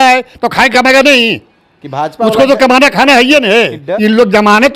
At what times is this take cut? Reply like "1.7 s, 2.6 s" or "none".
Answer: 3.8 s